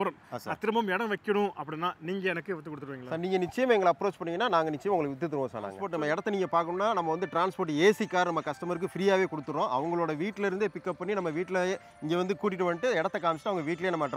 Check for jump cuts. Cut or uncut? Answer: cut